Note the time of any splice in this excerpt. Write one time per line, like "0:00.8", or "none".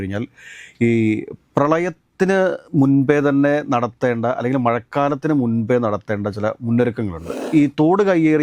0:07.4